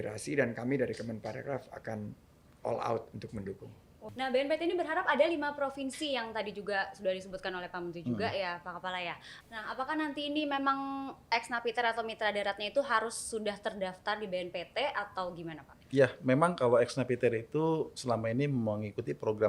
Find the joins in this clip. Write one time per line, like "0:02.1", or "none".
0:04.1
0:09.3